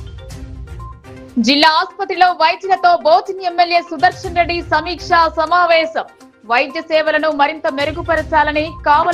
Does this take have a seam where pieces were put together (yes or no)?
no